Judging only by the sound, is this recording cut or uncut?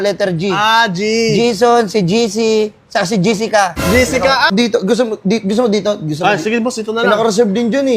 cut